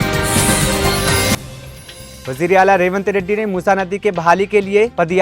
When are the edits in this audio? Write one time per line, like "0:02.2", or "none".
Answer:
0:01.4